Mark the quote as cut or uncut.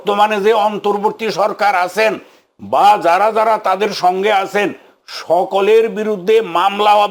uncut